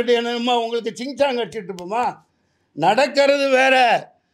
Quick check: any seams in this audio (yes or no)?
no